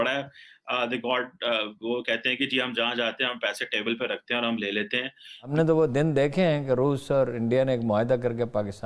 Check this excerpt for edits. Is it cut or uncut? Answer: cut